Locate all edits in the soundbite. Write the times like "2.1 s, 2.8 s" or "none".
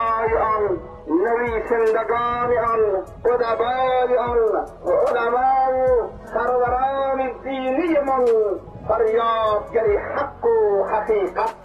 0.9 s, 3.1 s, 4.7 s, 6.2 s, 8.7 s